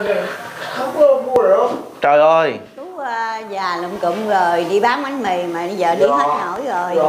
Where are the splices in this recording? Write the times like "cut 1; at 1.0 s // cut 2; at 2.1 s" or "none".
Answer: none